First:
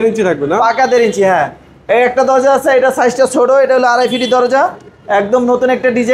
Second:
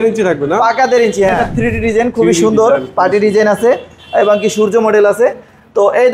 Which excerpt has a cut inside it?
second; 1 cut; at 1.5 s

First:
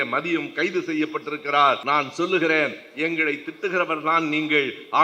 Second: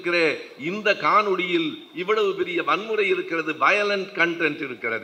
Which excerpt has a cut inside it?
first; 1 cut; at 1.8 s

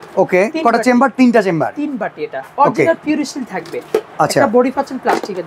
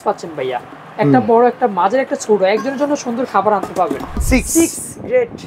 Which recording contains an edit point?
second; 1 cut; at 4.2 s

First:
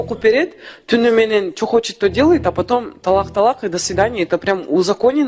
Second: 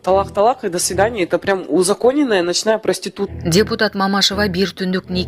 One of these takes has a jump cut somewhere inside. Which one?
second; 1 cut; at 3.3 s

